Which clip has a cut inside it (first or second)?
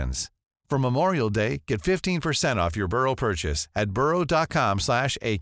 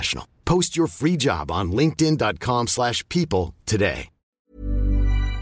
second